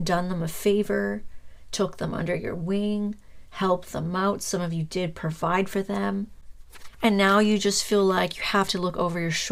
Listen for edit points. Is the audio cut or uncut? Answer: uncut